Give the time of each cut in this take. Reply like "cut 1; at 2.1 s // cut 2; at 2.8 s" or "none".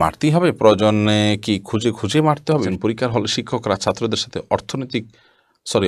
cut 1; at 2.5 s